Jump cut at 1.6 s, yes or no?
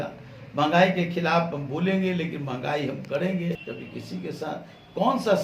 no